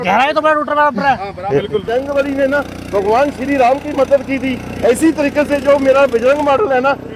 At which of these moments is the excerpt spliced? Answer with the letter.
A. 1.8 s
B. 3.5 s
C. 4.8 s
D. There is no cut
A